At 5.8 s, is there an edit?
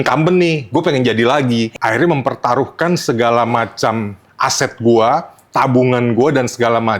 no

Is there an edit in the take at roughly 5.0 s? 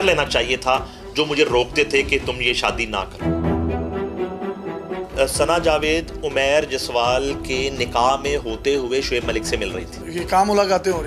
yes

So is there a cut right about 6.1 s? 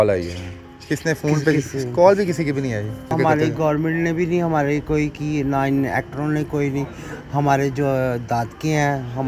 no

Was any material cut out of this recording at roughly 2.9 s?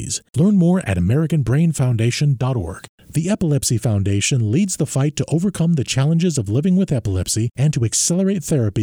yes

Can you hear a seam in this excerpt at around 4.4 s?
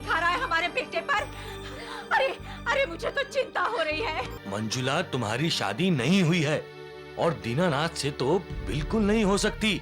yes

